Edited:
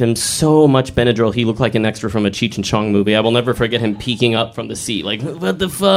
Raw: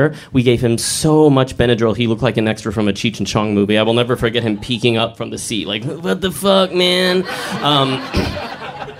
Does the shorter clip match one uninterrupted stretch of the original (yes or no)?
yes